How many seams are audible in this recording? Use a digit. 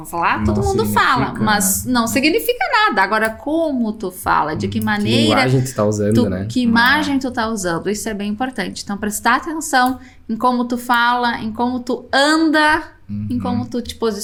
0